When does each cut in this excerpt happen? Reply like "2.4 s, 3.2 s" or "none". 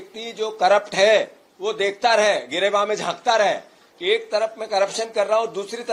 none